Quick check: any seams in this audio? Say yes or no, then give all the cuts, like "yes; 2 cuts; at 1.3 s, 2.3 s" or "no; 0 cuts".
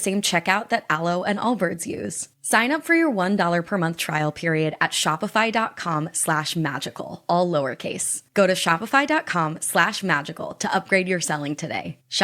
no; 0 cuts